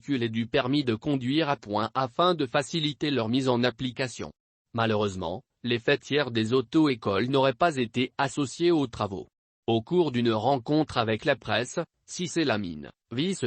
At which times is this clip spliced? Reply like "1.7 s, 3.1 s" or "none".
none